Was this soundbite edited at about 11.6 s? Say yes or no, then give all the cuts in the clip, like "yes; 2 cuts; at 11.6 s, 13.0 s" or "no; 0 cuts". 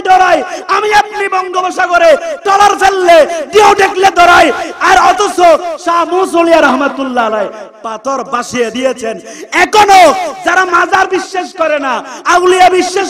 no; 0 cuts